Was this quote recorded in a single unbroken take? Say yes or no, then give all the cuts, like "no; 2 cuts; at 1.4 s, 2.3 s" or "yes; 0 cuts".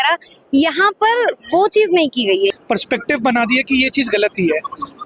no; 1 cut; at 2.6 s